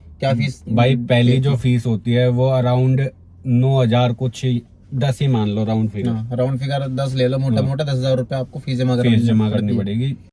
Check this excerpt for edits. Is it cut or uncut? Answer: uncut